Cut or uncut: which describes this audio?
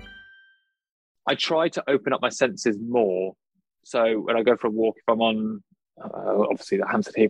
cut